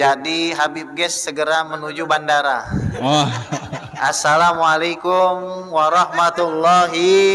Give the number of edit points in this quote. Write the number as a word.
zero